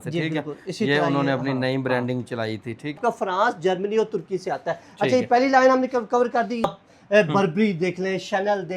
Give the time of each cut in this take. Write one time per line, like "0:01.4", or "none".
0:03.0
0:06.7